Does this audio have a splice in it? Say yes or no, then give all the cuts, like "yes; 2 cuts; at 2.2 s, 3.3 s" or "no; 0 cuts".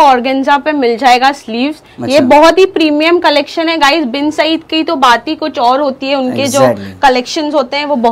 no; 0 cuts